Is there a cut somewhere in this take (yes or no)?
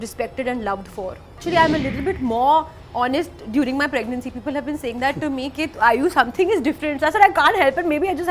yes